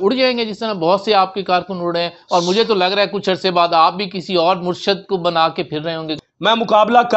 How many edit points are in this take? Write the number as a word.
one